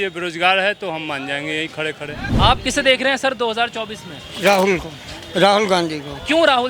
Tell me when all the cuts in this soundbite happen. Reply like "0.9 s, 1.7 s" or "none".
2.3 s